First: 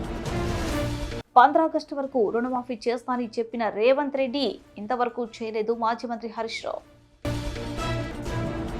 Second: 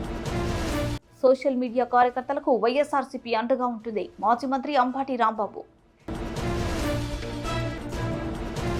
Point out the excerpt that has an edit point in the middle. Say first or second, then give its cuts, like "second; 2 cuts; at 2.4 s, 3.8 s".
first; 1 cut; at 0.9 s